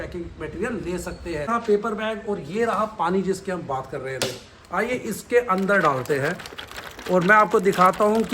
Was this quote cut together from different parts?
yes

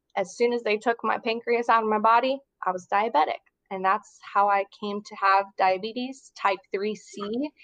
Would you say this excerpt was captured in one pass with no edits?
yes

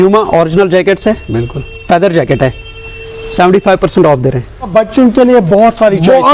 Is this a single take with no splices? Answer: no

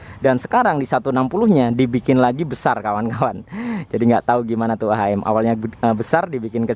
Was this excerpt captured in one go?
yes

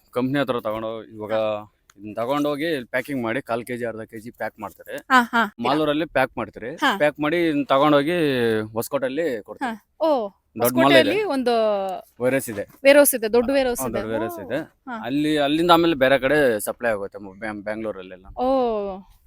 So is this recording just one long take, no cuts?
no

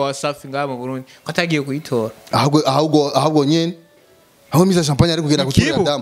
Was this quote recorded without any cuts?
yes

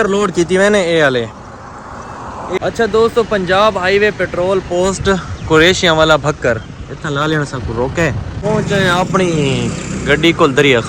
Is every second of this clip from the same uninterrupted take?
no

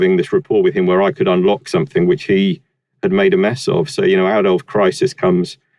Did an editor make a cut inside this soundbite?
no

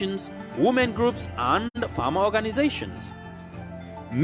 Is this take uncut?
yes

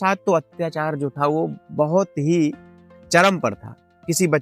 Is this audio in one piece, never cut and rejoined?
yes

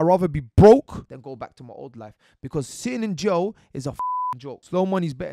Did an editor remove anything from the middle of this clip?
yes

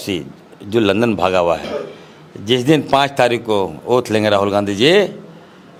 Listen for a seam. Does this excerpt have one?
no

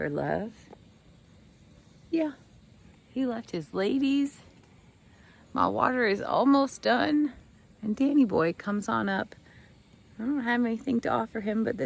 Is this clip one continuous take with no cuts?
yes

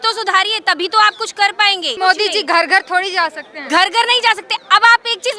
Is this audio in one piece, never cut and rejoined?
no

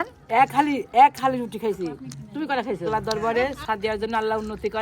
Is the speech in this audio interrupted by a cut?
yes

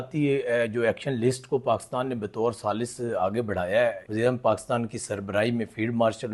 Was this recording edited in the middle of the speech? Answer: yes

